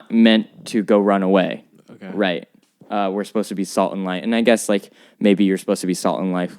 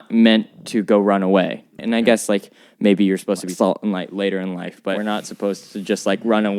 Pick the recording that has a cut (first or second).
second